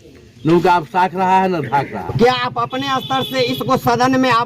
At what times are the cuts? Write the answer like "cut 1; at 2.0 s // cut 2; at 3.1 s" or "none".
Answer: cut 1; at 2.1 s